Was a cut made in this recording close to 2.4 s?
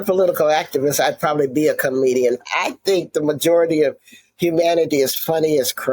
yes; 1 cut; at 2.4 s

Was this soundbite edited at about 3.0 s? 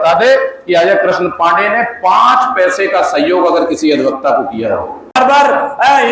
no; 1 cut; at 5.1 s

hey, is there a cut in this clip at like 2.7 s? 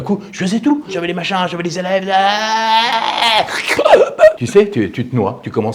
no; 1 cut; at 0.9 s

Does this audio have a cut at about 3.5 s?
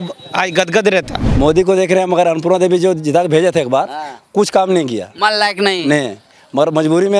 no; 1 cut; at 1.2 s

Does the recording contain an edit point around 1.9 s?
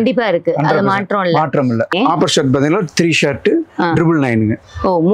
yes; 1 cut; at 1.9 s

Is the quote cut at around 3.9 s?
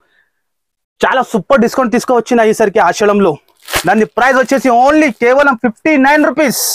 no; 0 cuts

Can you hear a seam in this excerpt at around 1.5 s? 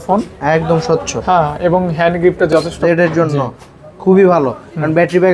no; 1 cut; at 2.8 s

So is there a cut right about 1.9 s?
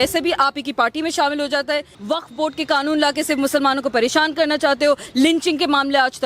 yes; 1 cut; at 1.9 s

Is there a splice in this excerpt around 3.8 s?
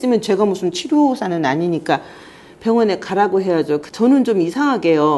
yes; 1 cut; at 3.8 s

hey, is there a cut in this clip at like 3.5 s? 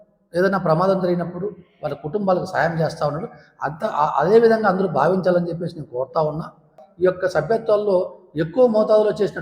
no; 1 cut; at 6.8 s

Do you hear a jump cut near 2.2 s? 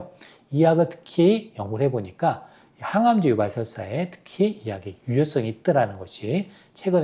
no; 0 cuts

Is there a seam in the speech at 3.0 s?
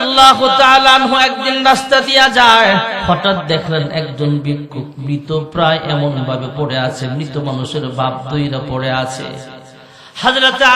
yes; 1 cut; at 3.0 s

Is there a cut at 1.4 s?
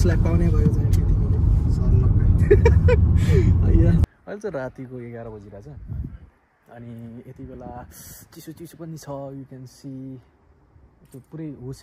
yes; 2 cuts; at 1.4 s, 4.0 s

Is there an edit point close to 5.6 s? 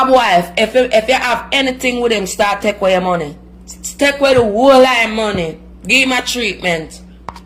no; 0 cuts

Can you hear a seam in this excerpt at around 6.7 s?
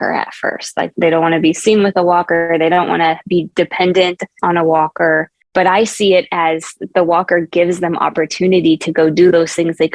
no; 1 cut; at 0.9 s

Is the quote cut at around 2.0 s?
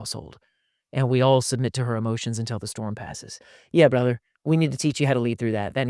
no; 0 cuts

